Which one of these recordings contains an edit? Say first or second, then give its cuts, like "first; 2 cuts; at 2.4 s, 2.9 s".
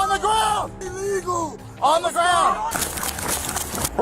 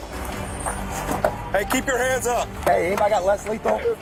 first; 1 cut; at 2.8 s